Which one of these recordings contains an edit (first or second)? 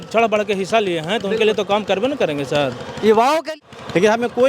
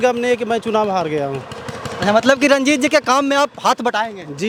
first